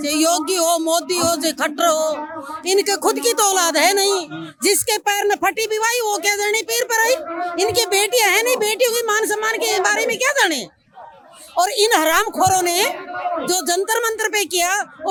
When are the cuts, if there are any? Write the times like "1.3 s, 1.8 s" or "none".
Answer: none